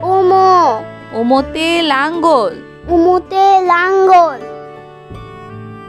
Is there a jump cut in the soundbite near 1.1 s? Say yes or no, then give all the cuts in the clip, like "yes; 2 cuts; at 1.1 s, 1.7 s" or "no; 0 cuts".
no; 1 cut; at 4.4 s